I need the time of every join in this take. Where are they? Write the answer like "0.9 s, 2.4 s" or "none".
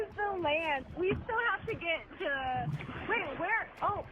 0.8 s, 2.9 s